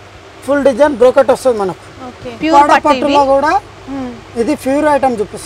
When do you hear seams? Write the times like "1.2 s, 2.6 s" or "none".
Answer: 2.3 s

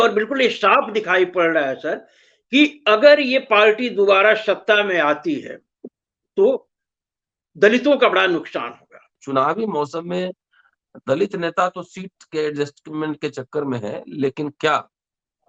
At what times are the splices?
9.2 s

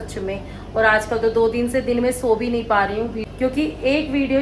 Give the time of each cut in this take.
3.2 s

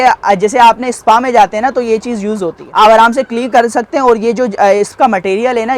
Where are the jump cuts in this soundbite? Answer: 2.6 s

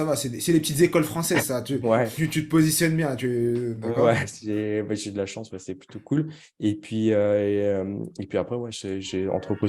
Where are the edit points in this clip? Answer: none

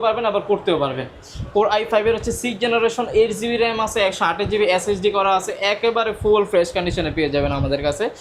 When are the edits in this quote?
none

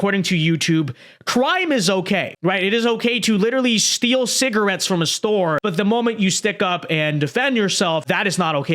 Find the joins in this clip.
2.3 s, 5.6 s, 8.0 s

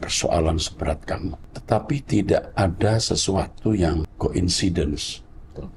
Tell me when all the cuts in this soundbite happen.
1.5 s, 4.1 s

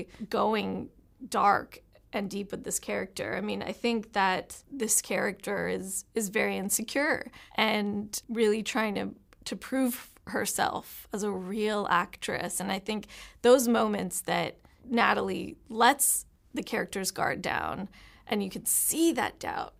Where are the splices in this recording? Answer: 4.5 s

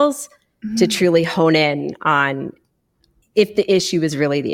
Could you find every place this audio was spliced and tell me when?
3.1 s

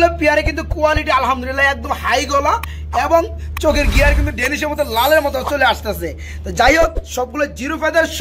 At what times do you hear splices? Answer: none

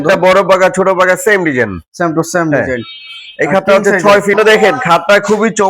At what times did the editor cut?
4.4 s

